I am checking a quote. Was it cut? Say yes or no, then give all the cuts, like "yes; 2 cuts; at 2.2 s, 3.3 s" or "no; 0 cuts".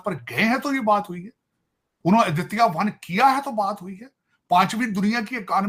no; 0 cuts